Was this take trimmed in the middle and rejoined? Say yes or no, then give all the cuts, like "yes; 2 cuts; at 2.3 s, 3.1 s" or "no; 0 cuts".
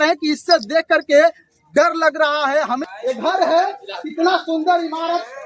yes; 1 cut; at 2.8 s